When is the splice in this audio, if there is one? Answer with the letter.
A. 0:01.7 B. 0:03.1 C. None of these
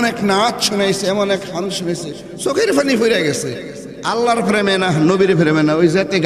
C